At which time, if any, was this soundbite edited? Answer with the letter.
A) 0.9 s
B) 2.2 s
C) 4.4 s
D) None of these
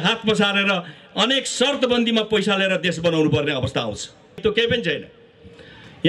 C